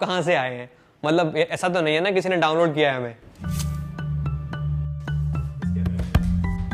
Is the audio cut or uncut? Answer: uncut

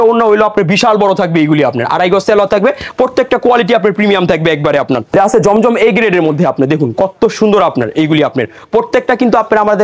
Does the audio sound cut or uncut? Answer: uncut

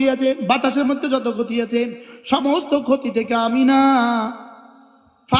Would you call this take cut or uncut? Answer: uncut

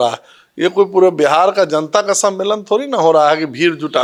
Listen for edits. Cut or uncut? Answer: uncut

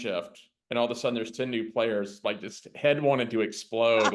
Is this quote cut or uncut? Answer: uncut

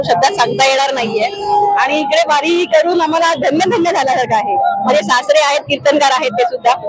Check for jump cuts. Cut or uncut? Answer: uncut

